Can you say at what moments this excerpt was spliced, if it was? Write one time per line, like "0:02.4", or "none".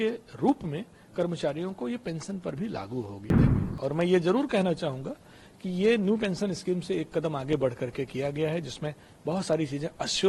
0:03.5